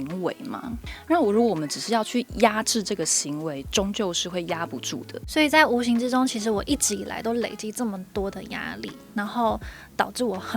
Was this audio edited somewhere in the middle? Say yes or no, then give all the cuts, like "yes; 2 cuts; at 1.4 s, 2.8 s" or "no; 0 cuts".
yes; 1 cut; at 5.2 s